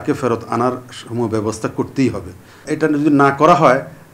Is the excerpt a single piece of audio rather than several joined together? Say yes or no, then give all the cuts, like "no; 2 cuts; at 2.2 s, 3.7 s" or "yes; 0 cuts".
no; 1 cut; at 2.7 s